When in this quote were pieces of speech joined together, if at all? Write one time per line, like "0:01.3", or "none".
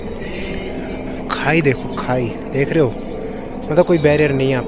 none